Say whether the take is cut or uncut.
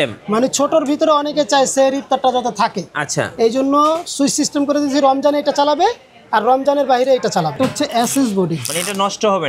cut